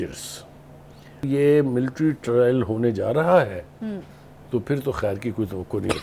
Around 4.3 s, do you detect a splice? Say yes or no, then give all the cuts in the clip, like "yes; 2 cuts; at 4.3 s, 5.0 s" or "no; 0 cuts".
no; 1 cut; at 1.2 s